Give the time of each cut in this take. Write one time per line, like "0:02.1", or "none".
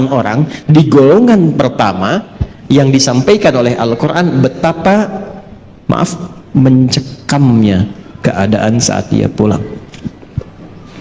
none